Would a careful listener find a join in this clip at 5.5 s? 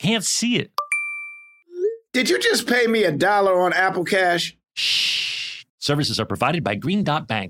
no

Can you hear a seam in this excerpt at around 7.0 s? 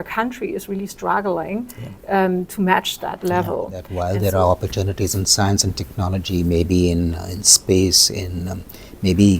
no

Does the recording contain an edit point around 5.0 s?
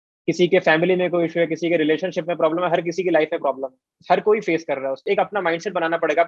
yes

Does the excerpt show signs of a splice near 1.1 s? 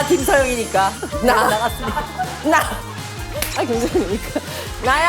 yes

